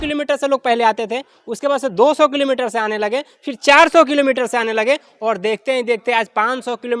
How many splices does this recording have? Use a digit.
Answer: 0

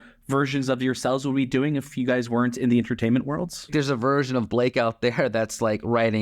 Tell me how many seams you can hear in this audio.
1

